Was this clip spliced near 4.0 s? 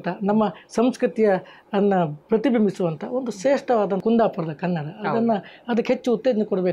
yes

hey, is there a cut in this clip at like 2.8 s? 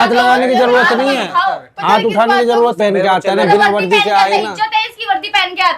yes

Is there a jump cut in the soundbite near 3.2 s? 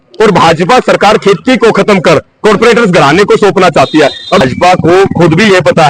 no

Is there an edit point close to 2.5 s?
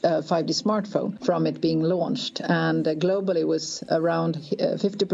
no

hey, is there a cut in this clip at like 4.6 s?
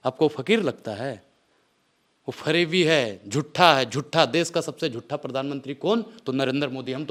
no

